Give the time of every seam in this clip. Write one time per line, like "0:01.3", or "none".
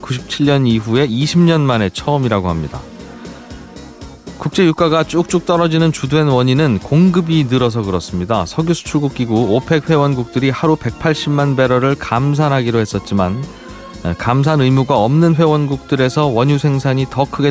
0:16.1